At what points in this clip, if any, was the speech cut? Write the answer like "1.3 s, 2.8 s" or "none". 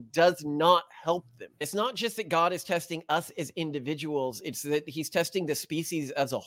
1.6 s